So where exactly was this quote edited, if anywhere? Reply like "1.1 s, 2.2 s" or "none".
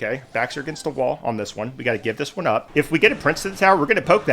2.7 s

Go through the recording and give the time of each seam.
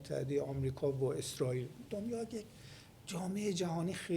1.8 s

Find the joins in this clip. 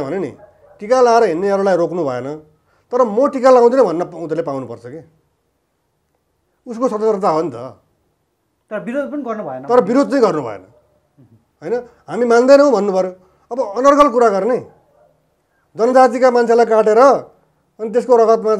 none

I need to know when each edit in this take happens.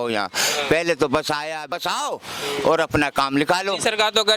1.7 s

